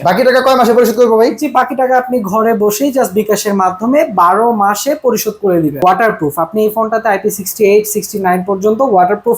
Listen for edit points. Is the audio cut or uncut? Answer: cut